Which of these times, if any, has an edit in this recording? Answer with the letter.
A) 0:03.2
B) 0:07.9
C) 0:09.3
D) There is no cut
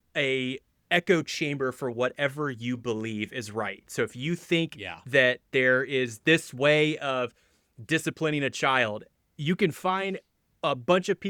D